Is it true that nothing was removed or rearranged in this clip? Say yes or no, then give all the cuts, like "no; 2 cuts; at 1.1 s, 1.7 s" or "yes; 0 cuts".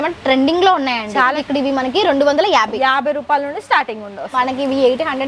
no; 2 cuts; at 1.4 s, 4.3 s